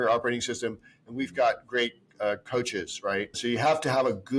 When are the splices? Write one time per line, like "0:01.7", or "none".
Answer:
0:03.3